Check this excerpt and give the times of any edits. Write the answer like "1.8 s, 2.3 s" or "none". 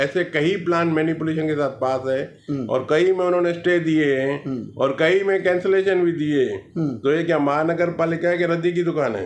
none